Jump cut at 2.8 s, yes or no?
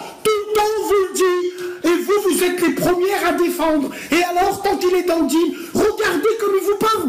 no